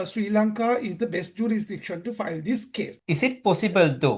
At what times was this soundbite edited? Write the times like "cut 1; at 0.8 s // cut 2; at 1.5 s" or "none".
cut 1; at 3.0 s

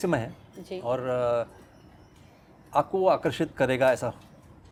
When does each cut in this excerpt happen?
none

